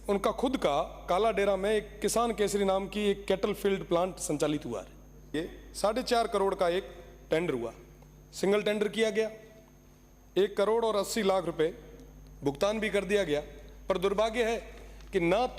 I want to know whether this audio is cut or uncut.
cut